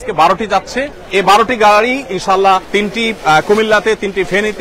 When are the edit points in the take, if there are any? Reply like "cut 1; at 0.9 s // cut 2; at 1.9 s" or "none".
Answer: cut 1; at 1.0 s // cut 2; at 2.7 s